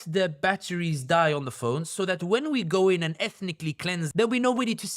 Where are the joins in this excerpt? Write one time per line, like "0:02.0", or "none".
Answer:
0:04.0